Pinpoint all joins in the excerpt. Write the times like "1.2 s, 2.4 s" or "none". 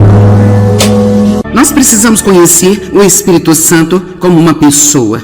1.4 s